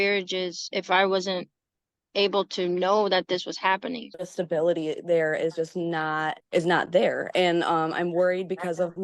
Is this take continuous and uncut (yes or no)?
no